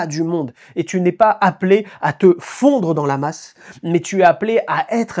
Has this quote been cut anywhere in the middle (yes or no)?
no